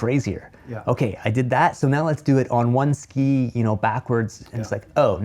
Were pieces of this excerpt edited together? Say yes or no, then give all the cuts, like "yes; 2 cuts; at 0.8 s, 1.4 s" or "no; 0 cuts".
no; 0 cuts